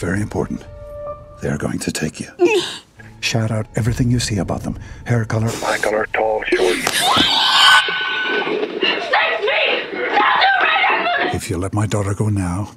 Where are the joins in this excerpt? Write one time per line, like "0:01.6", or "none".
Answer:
0:01.3
0:06.8
0:11.3